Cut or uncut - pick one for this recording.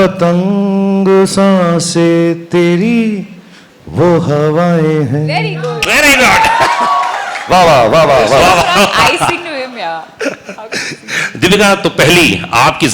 uncut